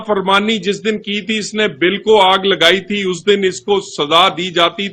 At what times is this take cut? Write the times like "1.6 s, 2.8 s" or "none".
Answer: none